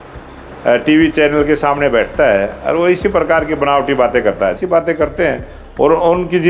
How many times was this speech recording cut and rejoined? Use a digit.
1